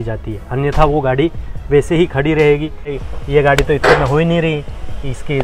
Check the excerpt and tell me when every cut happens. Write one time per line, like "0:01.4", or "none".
0:03.1